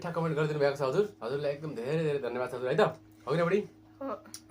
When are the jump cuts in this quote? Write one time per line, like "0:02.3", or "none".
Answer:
0:01.2